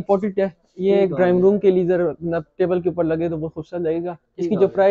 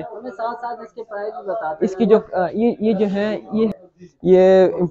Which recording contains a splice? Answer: second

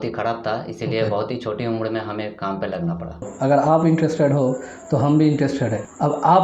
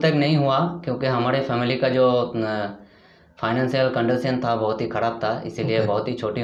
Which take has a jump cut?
first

